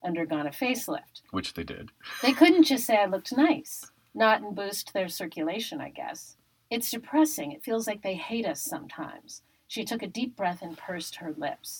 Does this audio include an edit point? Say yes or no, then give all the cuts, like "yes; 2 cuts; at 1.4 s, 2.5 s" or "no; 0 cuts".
no; 0 cuts